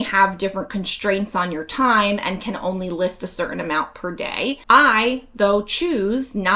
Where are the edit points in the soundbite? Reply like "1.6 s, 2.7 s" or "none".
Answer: 4.6 s